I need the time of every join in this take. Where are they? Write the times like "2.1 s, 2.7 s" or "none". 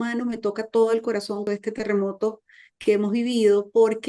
1.4 s

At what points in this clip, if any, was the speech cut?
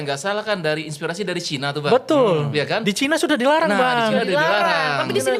none

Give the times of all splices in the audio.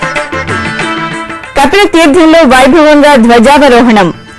1.4 s

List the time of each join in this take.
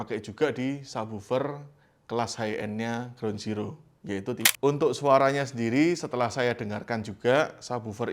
4.5 s

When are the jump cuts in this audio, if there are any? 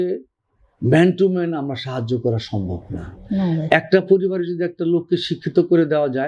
none

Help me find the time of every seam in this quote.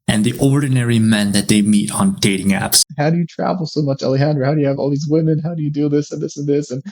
2.9 s

